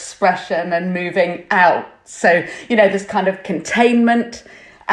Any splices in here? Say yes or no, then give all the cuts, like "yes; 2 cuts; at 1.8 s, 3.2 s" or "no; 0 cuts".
no; 0 cuts